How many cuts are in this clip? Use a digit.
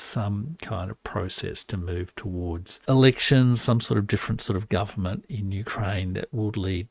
1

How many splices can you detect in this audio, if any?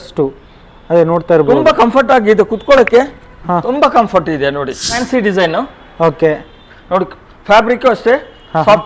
1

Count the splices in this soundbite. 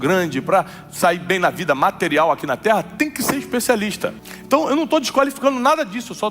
1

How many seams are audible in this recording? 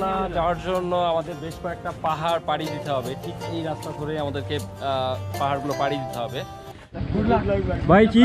1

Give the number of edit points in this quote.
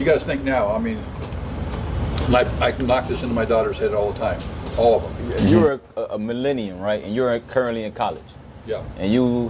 1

